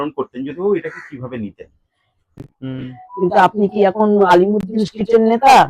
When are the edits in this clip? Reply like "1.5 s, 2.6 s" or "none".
2.5 s